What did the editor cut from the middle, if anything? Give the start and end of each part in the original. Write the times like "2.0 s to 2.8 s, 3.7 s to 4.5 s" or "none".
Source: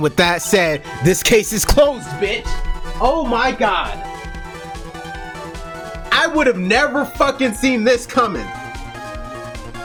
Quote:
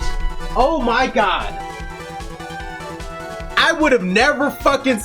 4.3 s to 4.4 s